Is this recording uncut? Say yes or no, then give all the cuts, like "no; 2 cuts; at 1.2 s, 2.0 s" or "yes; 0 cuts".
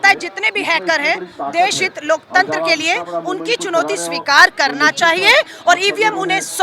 yes; 0 cuts